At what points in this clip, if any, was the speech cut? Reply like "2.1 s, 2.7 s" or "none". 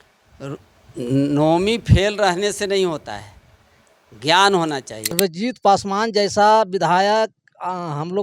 5.1 s